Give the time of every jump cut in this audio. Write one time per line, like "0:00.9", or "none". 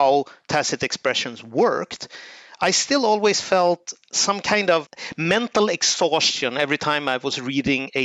none

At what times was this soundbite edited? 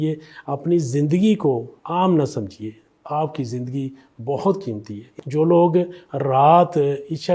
0:01.7
0:05.2

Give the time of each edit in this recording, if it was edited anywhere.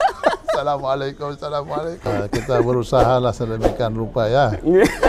0:02.2

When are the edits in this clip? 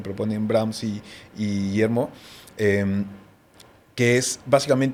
none

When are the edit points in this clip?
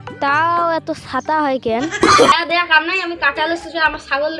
0:02.3

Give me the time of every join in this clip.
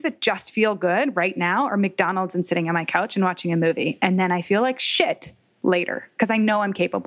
0:06.1

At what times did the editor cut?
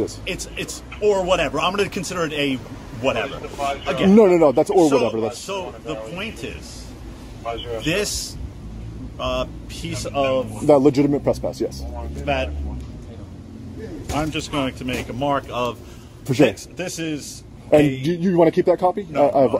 none

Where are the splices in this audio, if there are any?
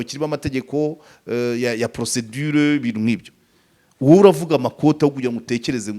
none

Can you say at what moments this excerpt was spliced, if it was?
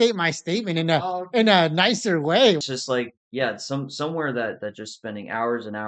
0:02.6

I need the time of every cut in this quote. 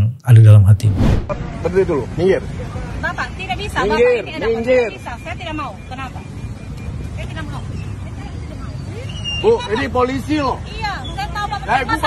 0:01.2

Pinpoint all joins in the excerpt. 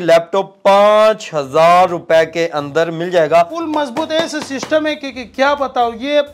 0:03.6

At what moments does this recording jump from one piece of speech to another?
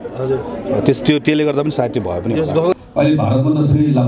0:02.7

